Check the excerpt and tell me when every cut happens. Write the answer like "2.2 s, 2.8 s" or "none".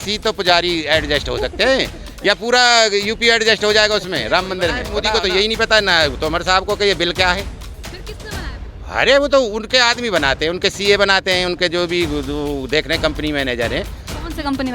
4.9 s